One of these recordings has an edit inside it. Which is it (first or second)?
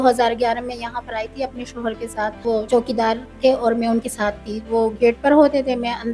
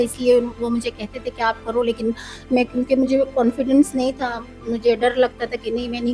first